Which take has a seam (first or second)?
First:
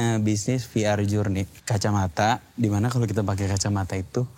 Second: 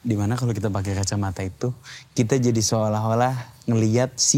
first